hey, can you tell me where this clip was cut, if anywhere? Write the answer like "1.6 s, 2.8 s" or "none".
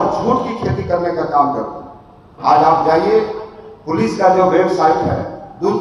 none